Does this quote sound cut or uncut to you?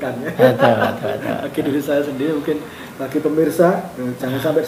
uncut